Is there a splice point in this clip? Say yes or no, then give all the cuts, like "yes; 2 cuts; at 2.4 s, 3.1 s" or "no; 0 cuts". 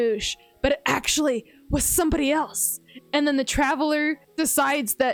no; 0 cuts